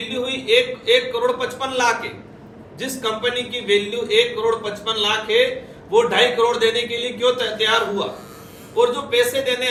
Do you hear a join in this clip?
no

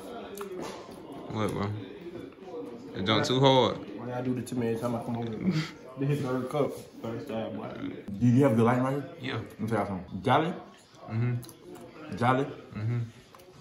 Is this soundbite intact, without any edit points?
no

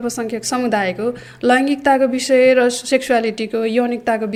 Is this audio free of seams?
yes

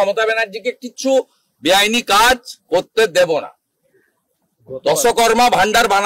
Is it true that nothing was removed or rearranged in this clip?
yes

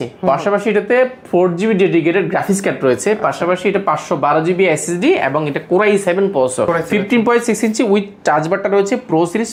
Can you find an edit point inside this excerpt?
no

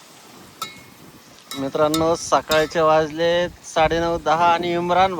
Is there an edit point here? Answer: no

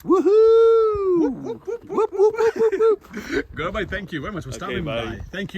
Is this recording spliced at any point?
no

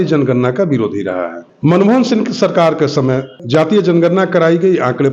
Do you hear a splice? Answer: yes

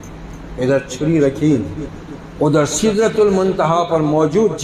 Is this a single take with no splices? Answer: yes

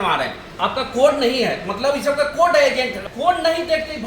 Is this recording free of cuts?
no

